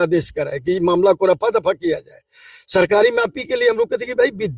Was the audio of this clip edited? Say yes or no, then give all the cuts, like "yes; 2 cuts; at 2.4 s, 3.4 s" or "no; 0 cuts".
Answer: no; 0 cuts